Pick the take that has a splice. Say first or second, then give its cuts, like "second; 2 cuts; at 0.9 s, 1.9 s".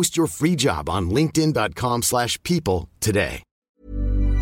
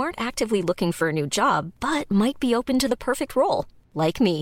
first; 1 cut; at 3.5 s